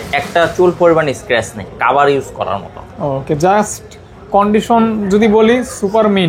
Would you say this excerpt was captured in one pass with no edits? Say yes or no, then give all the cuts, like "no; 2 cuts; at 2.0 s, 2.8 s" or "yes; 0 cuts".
yes; 0 cuts